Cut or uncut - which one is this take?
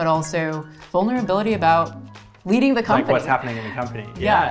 uncut